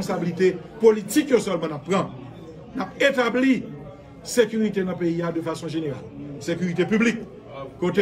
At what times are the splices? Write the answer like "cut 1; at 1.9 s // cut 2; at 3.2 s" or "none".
none